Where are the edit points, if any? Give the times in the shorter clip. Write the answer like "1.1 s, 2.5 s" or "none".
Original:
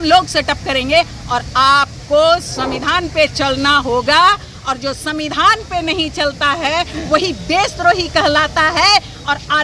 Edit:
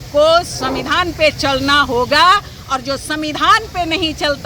none